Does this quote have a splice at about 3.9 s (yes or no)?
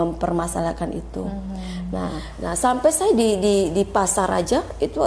no